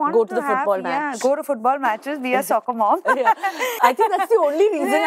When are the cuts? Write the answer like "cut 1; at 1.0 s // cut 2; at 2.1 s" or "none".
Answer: cut 1; at 3.8 s